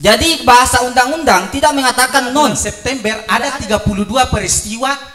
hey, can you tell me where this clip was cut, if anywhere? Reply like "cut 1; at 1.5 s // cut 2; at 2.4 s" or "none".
cut 1; at 2.7 s